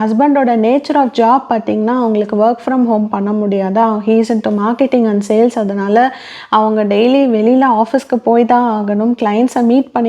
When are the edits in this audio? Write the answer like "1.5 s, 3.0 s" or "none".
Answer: none